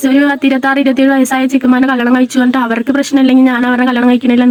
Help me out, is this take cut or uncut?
uncut